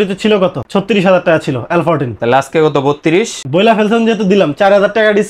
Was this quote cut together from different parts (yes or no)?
no